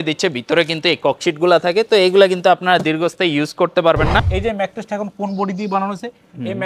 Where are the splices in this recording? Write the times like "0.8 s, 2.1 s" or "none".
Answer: 4.3 s